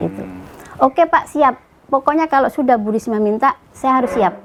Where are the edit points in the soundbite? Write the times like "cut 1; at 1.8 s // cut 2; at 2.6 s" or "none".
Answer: none

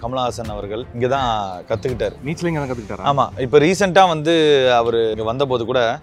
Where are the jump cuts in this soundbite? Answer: cut 1; at 0.9 s // cut 2; at 2.2 s // cut 3; at 5.1 s

